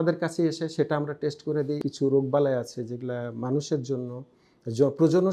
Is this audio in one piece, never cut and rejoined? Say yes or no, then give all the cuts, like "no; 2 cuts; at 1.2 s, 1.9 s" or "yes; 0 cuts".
no; 1 cut; at 1.8 s